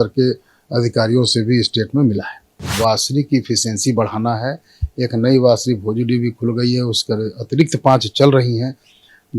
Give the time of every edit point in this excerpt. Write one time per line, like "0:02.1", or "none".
0:02.8

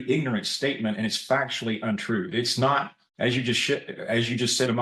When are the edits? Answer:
none

